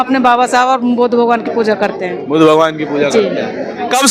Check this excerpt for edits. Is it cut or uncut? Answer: uncut